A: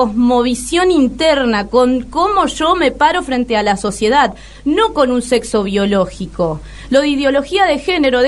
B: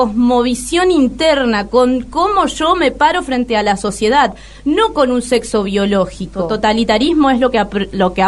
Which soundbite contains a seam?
B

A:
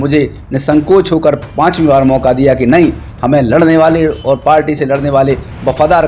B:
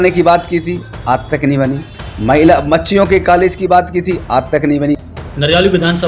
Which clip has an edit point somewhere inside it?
B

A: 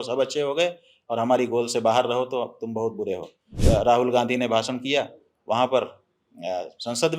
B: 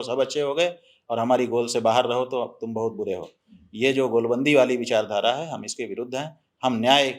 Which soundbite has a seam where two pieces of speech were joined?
A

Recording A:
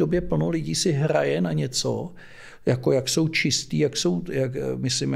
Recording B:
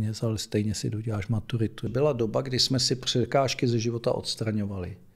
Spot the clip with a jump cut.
B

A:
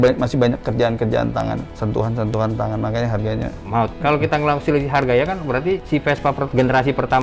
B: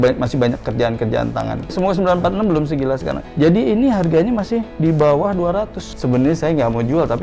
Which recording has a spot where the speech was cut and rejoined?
B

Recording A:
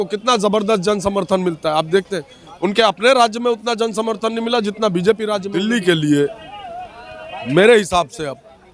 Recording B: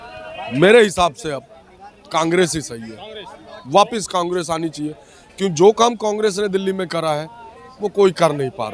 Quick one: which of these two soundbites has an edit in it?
A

